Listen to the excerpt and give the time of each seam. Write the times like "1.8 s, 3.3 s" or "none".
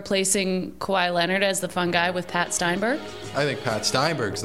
none